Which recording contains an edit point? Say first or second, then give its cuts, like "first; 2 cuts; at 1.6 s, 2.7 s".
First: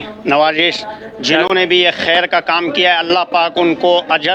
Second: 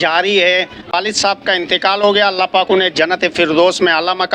second; 1 cut; at 1.0 s